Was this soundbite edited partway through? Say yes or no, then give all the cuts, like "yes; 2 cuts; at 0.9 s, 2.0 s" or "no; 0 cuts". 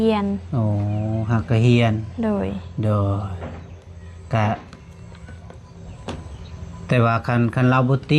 no; 0 cuts